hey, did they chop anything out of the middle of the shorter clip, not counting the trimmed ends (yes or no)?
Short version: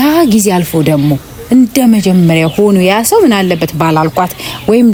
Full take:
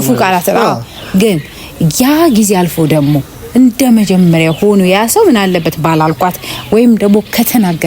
no